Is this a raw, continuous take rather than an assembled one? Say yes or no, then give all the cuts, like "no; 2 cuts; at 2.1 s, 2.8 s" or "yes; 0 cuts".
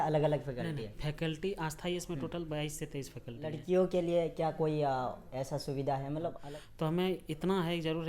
no; 2 cuts; at 3.6 s, 6.4 s